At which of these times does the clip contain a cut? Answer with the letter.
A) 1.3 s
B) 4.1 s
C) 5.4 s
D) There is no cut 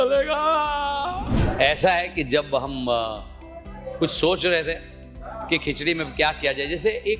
A